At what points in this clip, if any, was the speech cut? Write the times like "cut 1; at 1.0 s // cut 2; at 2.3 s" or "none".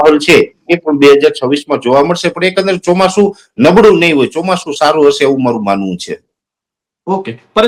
none